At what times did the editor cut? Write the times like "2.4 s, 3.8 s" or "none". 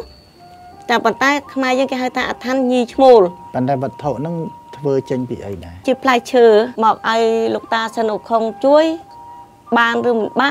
5.8 s, 6.7 s